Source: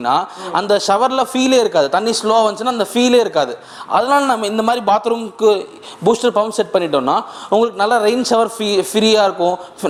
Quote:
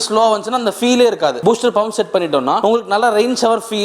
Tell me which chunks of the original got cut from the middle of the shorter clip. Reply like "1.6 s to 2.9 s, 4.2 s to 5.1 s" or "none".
3.5 s to 6.0 s, 7.2 s to 7.5 s